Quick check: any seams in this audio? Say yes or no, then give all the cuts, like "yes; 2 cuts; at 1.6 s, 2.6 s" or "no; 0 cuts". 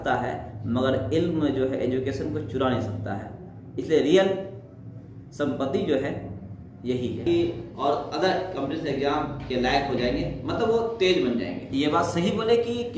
yes; 2 cuts; at 7.2 s, 11.6 s